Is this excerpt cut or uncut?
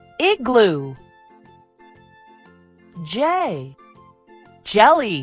uncut